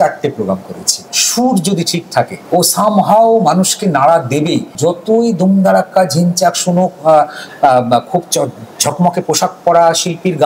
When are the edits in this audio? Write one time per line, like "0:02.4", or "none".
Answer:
0:01.1
0:02.4
0:04.8